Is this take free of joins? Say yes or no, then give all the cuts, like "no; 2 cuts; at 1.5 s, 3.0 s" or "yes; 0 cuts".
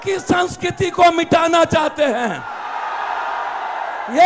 yes; 0 cuts